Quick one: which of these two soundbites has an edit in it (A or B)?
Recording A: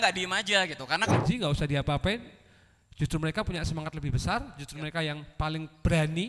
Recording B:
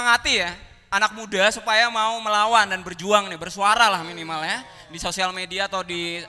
A